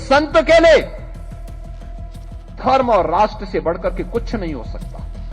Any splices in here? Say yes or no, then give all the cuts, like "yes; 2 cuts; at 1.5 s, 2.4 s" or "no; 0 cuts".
yes; 2 cuts; at 1.1 s, 2.6 s